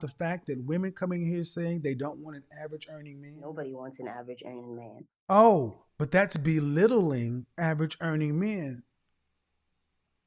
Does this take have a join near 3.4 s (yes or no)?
yes